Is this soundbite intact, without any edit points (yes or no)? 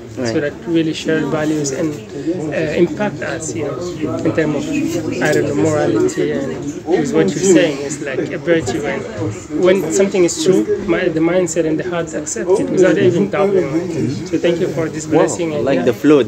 yes